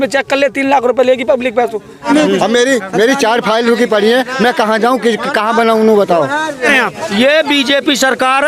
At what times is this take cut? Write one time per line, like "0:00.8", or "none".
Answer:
0:02.1
0:06.7